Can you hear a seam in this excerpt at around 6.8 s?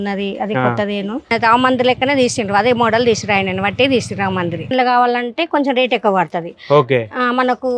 no; 2 cuts; at 1.3 s, 4.7 s

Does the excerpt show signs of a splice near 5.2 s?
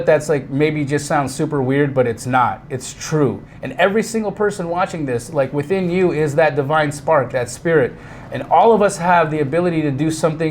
no; 1 cut; at 3.4 s

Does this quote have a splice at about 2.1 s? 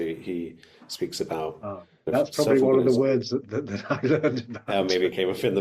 yes; 2 cuts; at 2.1 s, 3.4 s

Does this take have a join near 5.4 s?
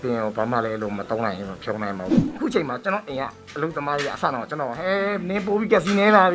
no; 1 cut; at 2.1 s

